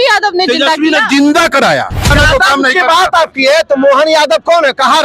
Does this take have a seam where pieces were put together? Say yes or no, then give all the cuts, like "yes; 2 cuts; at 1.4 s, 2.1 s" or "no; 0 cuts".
yes; 1 cut; at 2.1 s